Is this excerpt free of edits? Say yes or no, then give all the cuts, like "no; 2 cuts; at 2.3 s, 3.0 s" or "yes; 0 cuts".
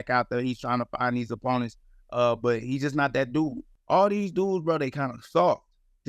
no; 1 cut; at 3.7 s